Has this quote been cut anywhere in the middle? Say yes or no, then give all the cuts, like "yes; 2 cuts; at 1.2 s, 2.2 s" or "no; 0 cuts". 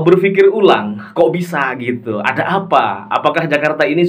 no; 0 cuts